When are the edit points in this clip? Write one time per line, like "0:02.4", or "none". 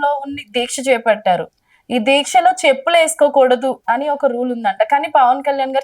0:03.8